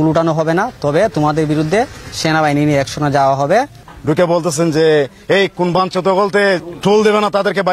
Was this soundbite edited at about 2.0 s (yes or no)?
no